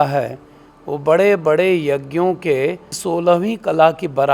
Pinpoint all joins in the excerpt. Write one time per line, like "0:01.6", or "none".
0:02.9